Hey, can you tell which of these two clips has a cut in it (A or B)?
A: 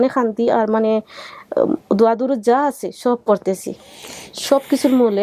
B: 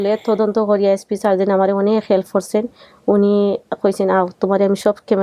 A